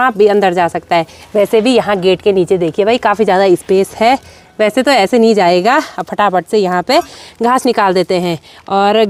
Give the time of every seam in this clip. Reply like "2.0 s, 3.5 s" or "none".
none

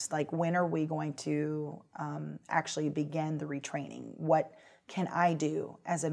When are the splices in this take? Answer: none

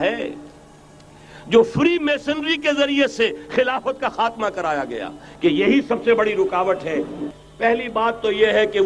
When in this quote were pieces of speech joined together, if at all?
7.2 s

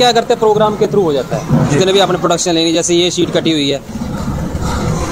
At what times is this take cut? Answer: none

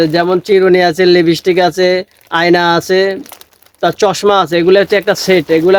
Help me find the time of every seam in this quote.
none

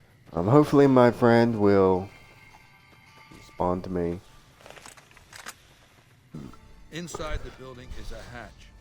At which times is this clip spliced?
6.3 s

